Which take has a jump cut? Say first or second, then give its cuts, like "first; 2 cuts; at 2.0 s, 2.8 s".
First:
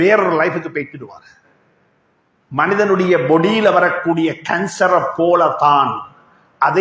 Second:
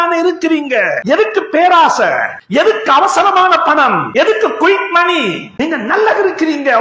second; 4 cuts; at 1.0 s, 2.4 s, 4.0 s, 5.5 s